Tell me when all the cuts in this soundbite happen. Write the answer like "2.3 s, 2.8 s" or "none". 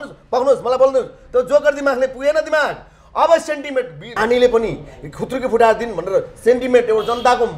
4.0 s

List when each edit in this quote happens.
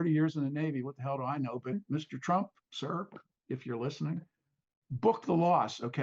1.7 s, 4.3 s

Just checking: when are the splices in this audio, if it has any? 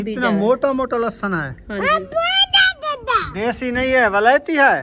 none

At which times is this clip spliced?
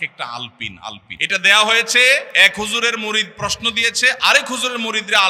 1.1 s, 2.3 s

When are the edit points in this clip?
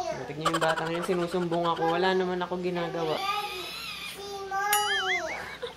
none

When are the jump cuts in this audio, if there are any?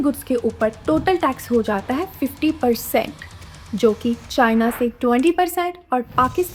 none

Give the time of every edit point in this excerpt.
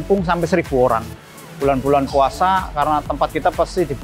none

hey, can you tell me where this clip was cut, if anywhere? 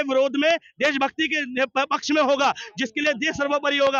none

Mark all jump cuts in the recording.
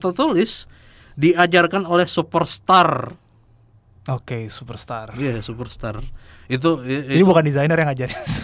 none

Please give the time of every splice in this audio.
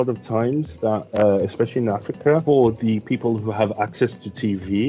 2.4 s

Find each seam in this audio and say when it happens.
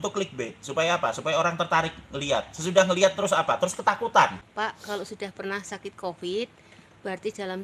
4.5 s

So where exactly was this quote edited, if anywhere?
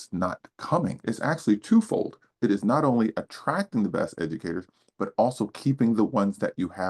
1.0 s

